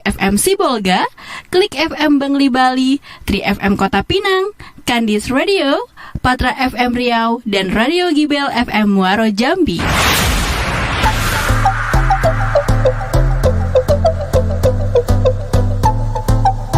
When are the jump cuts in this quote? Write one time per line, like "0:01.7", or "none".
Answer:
0:11.1